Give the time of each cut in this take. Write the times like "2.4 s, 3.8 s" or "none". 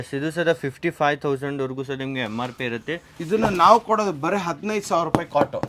none